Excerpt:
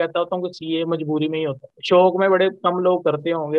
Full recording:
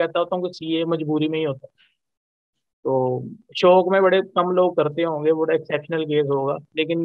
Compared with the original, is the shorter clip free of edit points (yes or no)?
no